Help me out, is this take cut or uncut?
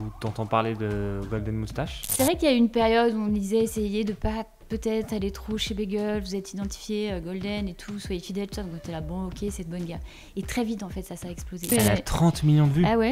cut